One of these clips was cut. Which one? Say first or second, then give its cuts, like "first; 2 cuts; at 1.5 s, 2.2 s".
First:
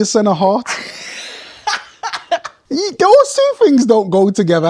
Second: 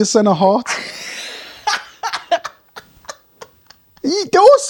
first; 1 cut; at 2.5 s